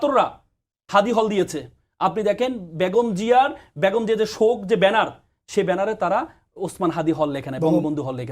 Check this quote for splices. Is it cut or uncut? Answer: uncut